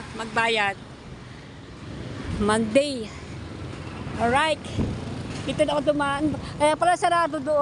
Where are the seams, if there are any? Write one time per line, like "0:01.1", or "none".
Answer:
none